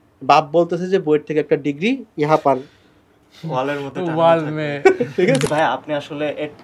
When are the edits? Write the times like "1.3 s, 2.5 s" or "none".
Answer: 5.5 s

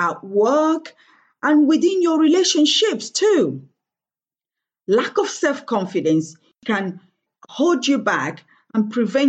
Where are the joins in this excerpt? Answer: 6.6 s

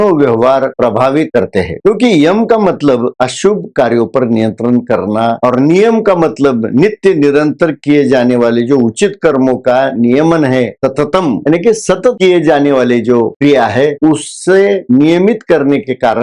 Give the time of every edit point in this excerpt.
5.4 s, 11.4 s

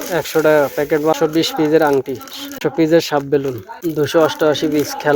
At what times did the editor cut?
1.2 s, 2.6 s, 3.7 s

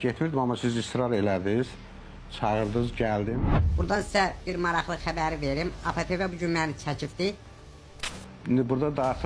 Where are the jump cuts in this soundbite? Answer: none

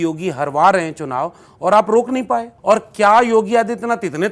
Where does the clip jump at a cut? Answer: 2.5 s

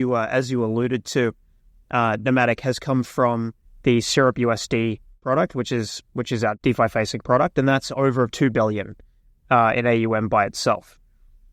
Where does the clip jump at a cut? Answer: 5.2 s, 6.6 s

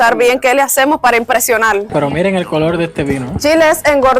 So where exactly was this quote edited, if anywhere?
1.9 s, 3.3 s

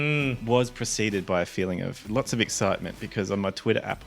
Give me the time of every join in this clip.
2.0 s

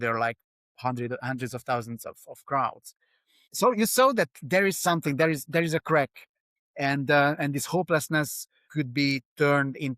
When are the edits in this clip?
3.5 s, 8.6 s

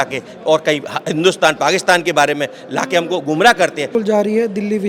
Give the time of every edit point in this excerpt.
3.9 s

